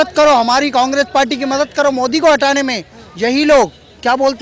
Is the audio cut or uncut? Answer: uncut